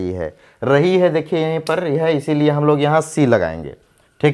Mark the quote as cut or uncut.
uncut